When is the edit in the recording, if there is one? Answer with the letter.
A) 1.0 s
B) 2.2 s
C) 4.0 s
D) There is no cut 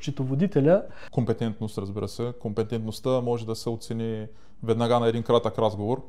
A